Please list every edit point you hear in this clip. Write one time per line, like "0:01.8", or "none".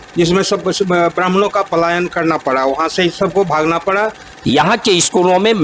0:04.3